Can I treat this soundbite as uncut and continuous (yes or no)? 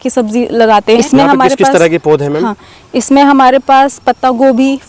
no